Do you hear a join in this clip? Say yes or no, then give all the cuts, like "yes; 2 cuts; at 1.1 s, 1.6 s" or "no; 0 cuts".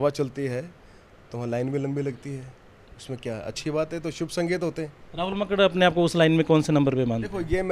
no; 0 cuts